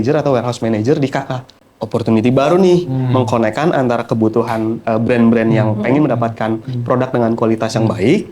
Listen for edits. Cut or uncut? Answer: cut